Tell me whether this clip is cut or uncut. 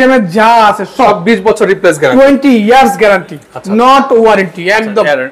uncut